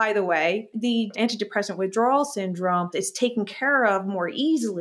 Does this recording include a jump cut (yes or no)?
yes